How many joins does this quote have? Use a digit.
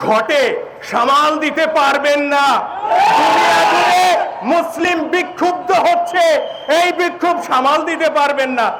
0